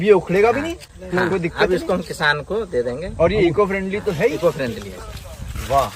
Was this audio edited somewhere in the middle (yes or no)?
no